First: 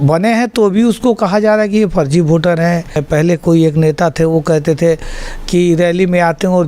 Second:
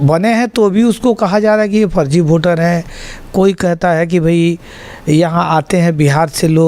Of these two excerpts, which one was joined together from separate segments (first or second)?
first